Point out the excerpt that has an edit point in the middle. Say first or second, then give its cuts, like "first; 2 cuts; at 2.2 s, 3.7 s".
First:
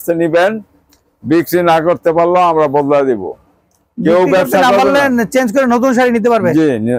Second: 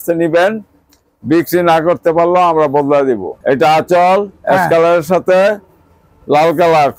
second; 1 cut; at 3.4 s